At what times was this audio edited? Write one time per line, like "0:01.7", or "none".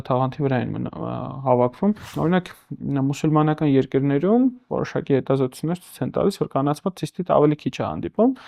0:02.1